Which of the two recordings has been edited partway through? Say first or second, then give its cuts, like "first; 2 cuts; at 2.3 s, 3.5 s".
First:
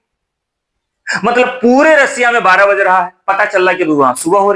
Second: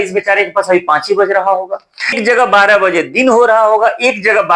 second; 1 cut; at 2.2 s